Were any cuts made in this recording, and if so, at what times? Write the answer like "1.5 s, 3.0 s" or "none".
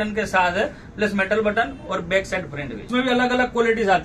2.8 s

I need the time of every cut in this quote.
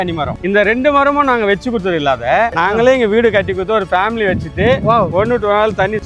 2.5 s

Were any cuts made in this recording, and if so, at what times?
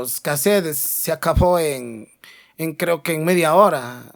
none

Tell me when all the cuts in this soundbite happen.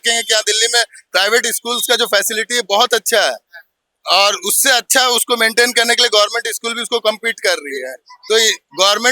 none

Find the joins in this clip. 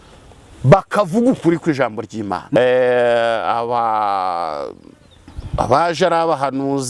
2.6 s

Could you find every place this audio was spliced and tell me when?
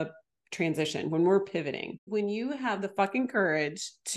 1.9 s

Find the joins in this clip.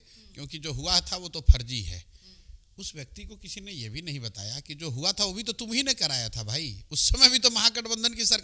none

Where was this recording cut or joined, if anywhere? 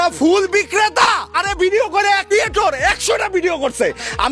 1.3 s, 2.3 s

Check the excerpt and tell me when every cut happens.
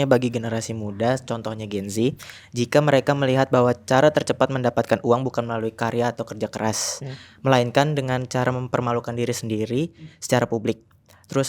none

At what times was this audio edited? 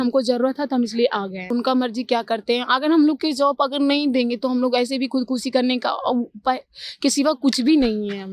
1.5 s

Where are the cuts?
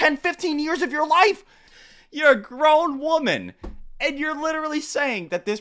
1.7 s

